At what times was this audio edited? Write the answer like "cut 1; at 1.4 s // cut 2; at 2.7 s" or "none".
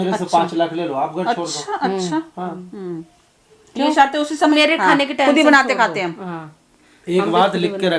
cut 1; at 4.5 s